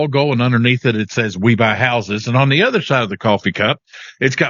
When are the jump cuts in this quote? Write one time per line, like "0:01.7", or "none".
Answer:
none